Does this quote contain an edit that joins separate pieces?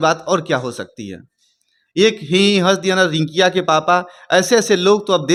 no; 0 cuts

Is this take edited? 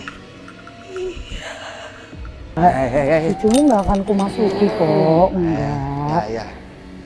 yes; 1 cut; at 2.6 s

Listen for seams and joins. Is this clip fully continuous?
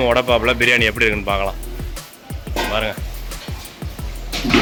yes; 0 cuts

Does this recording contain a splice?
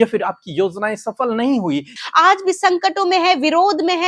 yes; 1 cut; at 2.0 s

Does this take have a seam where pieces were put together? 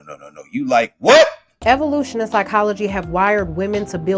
yes; 1 cut; at 1.6 s

